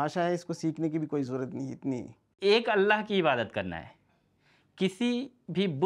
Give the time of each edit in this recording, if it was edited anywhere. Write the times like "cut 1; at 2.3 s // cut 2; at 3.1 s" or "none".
cut 1; at 2.3 s